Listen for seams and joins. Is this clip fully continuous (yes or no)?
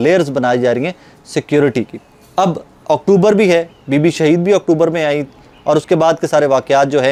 yes